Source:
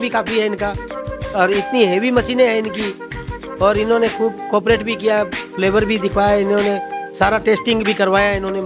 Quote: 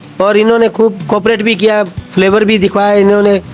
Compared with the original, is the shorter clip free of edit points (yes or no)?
yes